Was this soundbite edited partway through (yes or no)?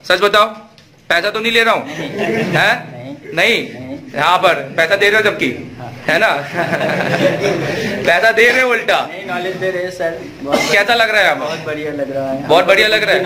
no